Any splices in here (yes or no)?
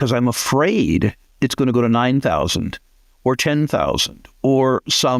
no